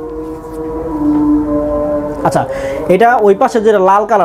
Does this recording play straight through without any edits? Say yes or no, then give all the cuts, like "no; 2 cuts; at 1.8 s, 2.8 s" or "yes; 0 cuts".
yes; 0 cuts